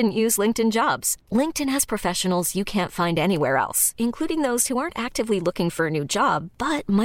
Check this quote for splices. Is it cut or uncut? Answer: uncut